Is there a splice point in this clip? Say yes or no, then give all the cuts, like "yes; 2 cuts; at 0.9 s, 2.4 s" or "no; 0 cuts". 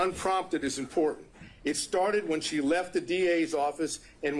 no; 0 cuts